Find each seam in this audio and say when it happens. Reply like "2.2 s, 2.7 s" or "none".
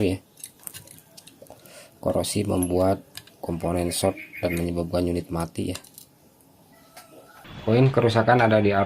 7.4 s